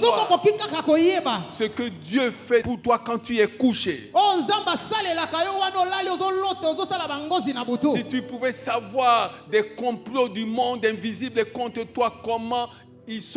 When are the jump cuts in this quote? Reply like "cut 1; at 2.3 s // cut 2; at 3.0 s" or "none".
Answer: none

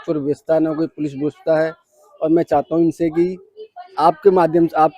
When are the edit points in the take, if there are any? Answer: none

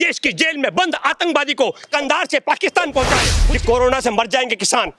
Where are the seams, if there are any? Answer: cut 1; at 3.3 s

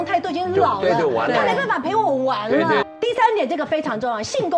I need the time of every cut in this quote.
cut 1; at 2.9 s

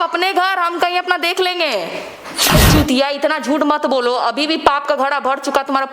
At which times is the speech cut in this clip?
cut 1; at 2.5 s

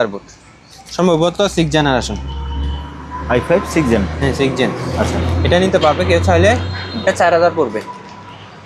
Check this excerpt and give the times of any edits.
none

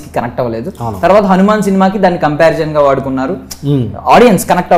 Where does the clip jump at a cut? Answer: none

